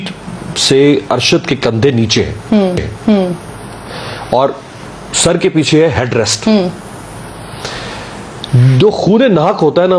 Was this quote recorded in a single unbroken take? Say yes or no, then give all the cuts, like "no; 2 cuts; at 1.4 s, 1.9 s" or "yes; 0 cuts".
yes; 0 cuts